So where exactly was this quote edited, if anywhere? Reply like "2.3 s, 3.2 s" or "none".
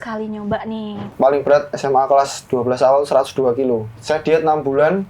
1.0 s, 4.0 s